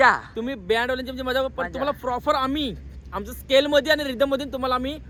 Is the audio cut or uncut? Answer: uncut